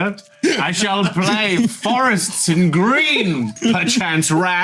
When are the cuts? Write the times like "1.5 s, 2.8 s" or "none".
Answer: 3.6 s